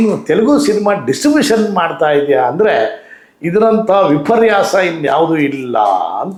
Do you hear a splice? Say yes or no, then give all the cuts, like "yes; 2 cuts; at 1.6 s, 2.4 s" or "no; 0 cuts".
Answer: no; 0 cuts